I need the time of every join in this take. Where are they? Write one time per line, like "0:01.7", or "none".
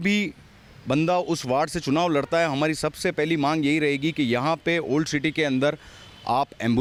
none